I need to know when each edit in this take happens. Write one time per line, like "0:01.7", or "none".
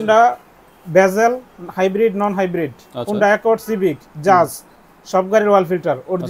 none